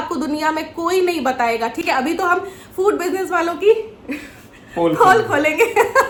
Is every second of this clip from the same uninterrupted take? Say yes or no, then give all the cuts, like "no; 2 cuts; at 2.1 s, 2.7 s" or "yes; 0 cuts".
yes; 0 cuts